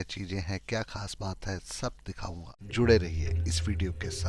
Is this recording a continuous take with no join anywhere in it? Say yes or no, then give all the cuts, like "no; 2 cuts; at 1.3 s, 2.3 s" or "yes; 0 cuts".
yes; 0 cuts